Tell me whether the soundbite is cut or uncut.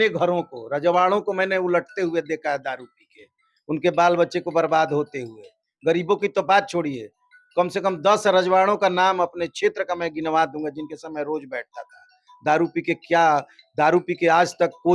uncut